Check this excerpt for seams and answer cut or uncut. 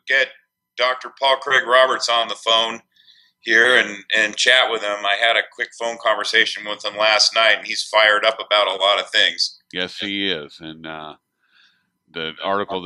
cut